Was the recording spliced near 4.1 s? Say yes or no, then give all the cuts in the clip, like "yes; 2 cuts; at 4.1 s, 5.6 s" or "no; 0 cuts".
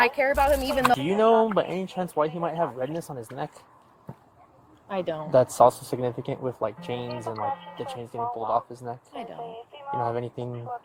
no; 1 cut; at 0.9 s